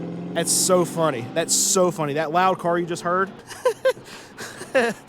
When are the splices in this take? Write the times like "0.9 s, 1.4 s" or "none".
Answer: 3.4 s